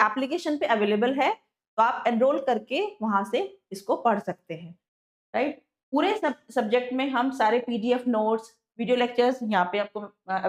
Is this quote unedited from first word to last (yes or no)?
yes